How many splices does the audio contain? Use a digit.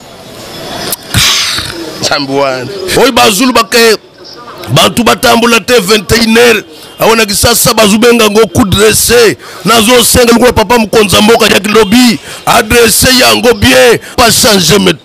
2